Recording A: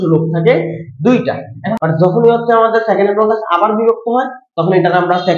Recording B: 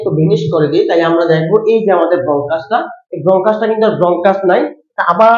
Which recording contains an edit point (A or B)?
A